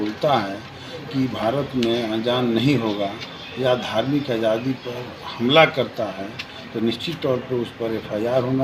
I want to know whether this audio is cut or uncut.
uncut